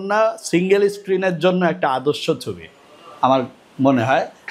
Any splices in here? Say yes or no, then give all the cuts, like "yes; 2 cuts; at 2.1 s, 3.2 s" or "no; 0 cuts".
no; 0 cuts